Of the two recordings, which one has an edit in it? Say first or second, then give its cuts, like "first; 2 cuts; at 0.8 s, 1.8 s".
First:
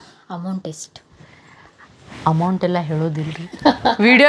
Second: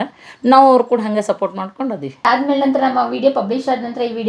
second; 1 cut; at 2.3 s